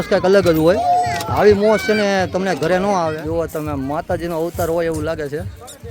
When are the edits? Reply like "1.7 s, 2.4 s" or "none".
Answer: 3.2 s